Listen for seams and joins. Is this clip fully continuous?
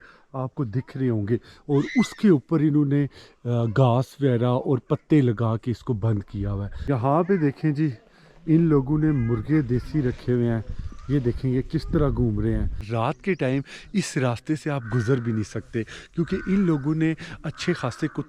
no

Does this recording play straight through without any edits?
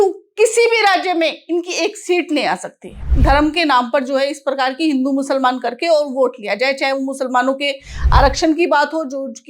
no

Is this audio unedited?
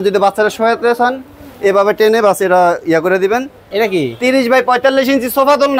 no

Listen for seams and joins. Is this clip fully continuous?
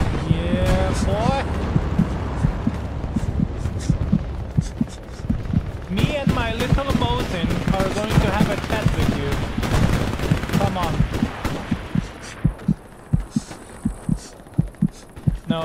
yes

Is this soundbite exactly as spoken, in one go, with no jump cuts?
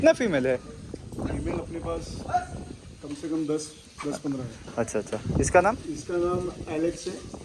yes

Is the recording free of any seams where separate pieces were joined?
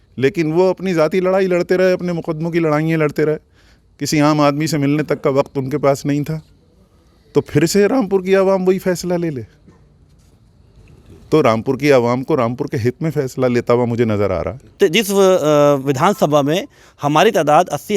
no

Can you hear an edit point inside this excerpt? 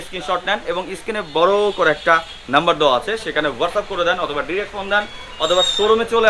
no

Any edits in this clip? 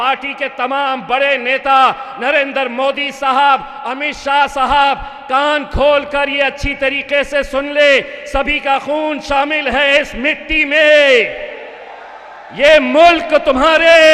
no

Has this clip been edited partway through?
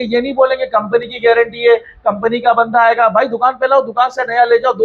no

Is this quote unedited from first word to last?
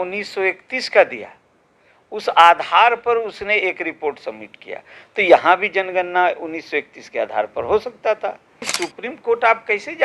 no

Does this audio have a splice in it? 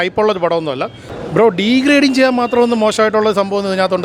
yes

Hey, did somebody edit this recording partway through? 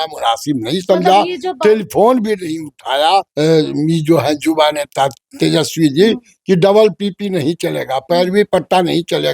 yes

